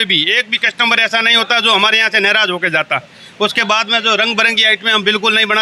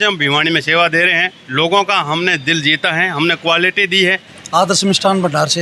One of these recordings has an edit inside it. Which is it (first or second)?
second